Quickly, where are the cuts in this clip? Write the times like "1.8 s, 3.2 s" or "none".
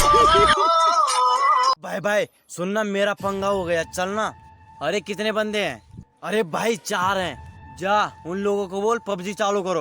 1.8 s